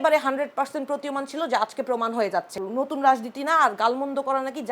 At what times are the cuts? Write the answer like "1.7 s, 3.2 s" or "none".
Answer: 2.5 s